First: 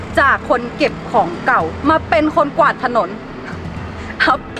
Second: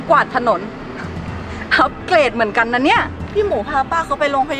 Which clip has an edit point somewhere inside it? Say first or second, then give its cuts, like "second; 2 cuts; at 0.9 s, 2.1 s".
second; 1 cut; at 3.2 s